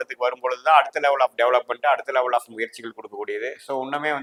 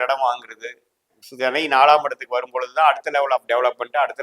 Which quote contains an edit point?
second; 1 cut; at 1.2 s

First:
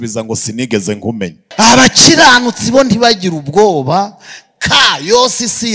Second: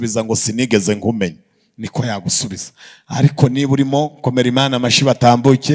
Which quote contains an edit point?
first; 1 cut; at 1.4 s

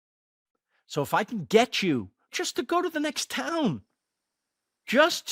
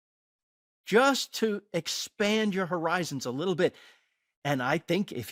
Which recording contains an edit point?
first; 1 cut; at 2.3 s

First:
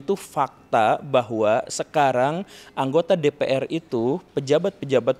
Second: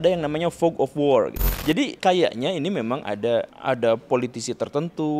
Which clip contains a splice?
second; 2 cuts; at 1.7 s, 3.5 s

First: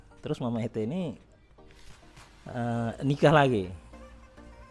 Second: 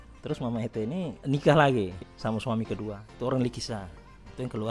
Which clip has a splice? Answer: second; 2 cuts; at 1.2 s, 2.1 s

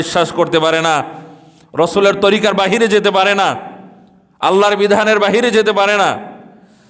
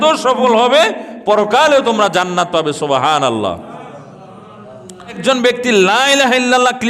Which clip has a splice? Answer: second; 1 cut; at 5.2 s

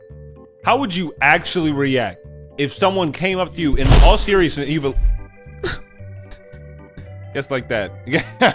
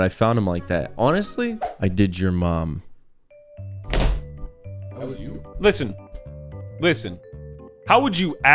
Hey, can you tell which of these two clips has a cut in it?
second; 1 cut; at 1.6 s

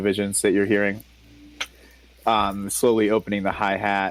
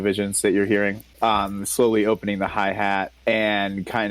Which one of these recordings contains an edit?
second; 2 cuts; at 1.1 s, 3.1 s

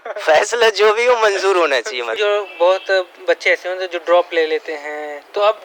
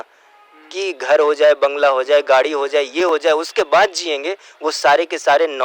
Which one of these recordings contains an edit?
first; 1 cut; at 2.1 s

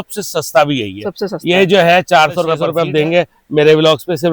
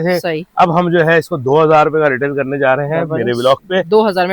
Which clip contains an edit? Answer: first; 1 cut; at 2.6 s

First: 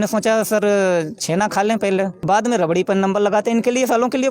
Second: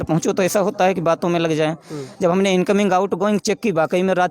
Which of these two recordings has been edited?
first; 1 cut; at 2.2 s

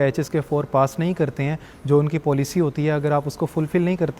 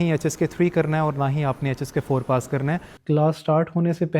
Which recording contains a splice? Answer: second; 1 cut; at 2.9 s

